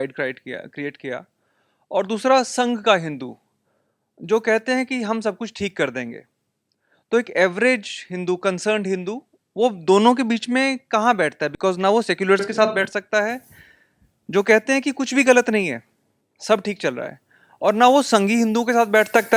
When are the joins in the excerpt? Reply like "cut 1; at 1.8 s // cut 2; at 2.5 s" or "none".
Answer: none